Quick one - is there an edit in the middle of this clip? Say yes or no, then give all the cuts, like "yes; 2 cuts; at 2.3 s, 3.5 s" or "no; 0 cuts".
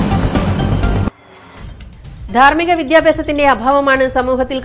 no; 0 cuts